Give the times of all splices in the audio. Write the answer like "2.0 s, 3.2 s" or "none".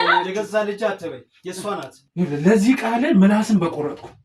2.0 s